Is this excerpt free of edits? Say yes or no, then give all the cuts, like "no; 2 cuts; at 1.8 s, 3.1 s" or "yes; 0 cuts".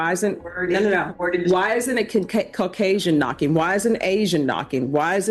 yes; 0 cuts